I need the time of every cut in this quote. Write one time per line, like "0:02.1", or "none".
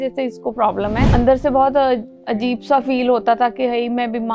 0:01.1